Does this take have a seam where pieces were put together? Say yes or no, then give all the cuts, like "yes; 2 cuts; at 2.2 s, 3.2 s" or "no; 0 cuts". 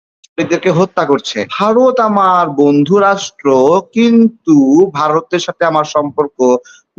yes; 1 cut; at 1.4 s